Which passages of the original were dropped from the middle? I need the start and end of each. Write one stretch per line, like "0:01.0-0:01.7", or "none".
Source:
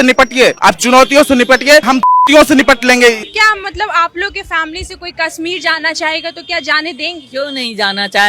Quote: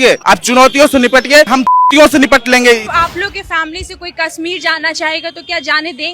0:03.3-0:03.9